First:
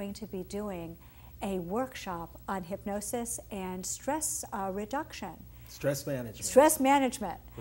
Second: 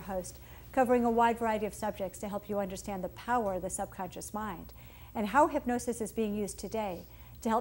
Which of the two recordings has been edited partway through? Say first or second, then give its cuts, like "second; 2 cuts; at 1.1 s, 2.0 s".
second; 1 cut; at 1.0 s